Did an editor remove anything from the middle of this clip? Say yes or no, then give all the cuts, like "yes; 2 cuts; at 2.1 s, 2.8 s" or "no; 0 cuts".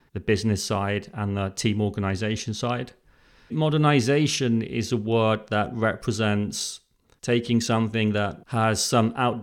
yes; 1 cut; at 3.5 s